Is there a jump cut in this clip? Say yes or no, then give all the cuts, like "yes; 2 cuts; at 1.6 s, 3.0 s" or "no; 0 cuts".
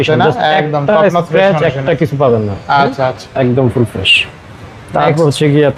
no; 0 cuts